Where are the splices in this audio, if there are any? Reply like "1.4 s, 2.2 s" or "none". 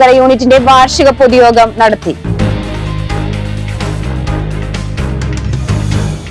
none